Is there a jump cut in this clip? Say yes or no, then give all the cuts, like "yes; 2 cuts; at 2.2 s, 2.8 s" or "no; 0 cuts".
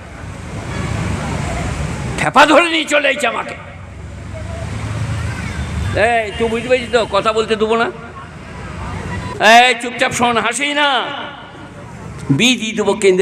yes; 1 cut; at 9.3 s